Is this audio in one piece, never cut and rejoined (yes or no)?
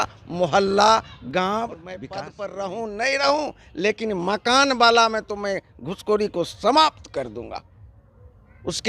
no